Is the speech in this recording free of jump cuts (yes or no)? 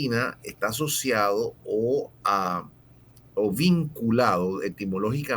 yes